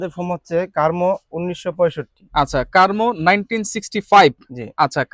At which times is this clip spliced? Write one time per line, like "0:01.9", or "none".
none